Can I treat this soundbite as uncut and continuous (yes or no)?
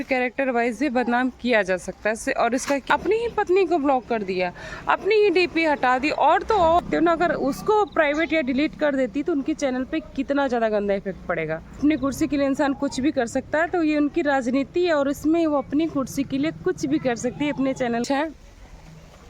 no